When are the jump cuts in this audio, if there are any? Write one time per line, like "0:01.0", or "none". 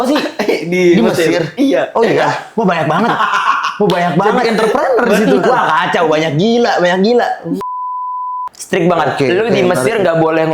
0:08.0